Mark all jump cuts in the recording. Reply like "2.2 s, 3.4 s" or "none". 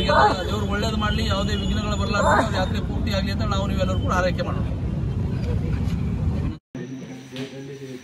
6.5 s